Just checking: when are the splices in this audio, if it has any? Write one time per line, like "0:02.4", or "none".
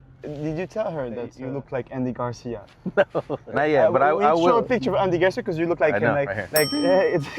0:01.4
0:03.4